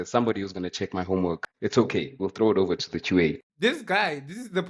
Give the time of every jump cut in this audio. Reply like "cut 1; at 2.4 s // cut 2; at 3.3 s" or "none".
cut 1; at 3.5 s